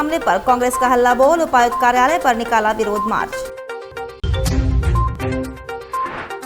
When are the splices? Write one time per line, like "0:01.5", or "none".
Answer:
none